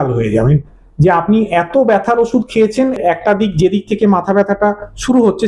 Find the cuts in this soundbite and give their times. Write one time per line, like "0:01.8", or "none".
0:03.0